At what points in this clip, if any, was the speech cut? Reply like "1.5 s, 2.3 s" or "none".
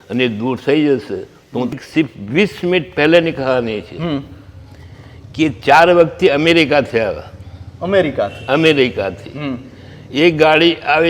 1.8 s